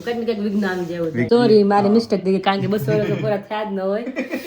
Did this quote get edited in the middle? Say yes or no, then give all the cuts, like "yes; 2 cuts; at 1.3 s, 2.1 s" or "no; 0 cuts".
yes; 1 cut; at 1.3 s